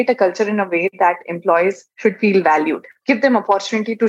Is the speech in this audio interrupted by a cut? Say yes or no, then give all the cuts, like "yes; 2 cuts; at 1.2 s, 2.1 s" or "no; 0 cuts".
yes; 2 cuts; at 1.9 s, 2.9 s